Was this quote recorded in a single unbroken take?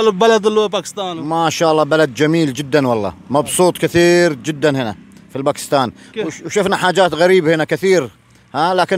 yes; 0 cuts

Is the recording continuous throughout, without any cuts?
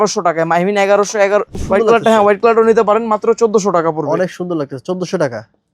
no; 1 cut; at 1.5 s

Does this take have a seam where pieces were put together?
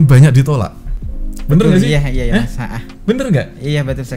no; 0 cuts

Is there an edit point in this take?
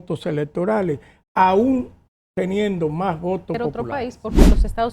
yes; 1 cut; at 3.5 s

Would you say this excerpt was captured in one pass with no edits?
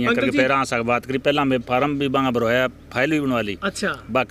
yes; 0 cuts

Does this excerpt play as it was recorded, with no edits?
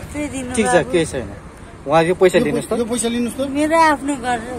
yes; 0 cuts

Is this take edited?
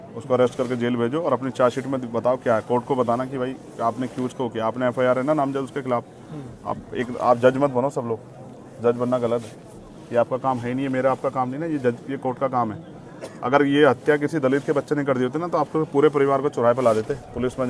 no; 0 cuts

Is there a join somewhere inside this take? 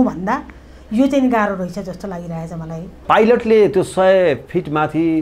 yes; 1 cut; at 3.0 s

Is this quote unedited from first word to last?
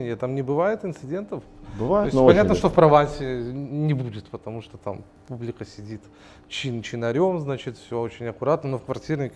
yes; 0 cuts

